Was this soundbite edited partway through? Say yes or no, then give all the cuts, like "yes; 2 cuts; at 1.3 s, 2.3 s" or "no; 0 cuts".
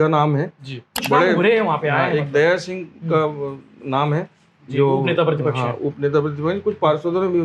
yes; 1 cut; at 1.0 s